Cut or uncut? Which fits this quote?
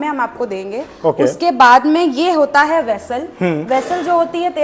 uncut